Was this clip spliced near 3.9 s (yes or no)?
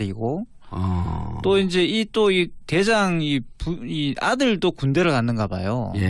yes